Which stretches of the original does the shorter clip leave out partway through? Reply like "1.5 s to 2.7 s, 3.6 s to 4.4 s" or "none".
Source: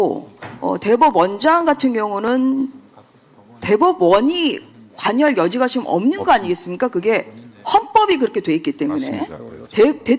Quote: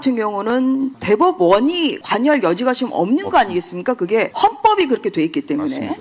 2.7 s to 3.6 s, 4.6 s to 5.0 s, 7.3 s to 7.6 s